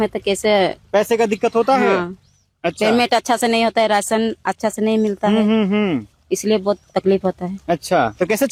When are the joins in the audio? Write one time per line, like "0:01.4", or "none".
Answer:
none